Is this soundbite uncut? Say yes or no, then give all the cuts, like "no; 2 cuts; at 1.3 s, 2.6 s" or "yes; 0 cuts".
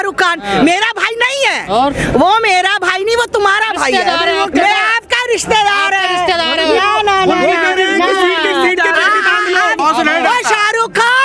no; 1 cut; at 9.8 s